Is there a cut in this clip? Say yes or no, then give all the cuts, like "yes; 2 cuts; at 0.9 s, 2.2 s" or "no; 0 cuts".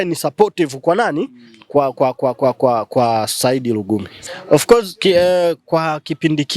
yes; 1 cut; at 4.3 s